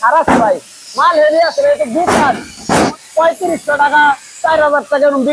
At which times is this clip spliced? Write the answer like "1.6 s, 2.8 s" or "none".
2.9 s